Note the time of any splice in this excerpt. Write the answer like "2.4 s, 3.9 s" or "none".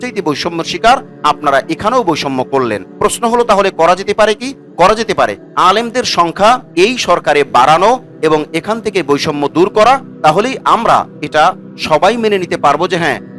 none